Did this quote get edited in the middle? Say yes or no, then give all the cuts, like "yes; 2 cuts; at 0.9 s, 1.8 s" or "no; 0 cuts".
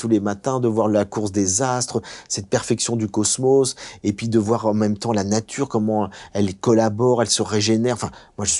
no; 0 cuts